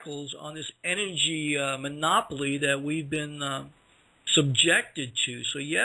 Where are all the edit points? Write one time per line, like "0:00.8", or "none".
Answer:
0:02.5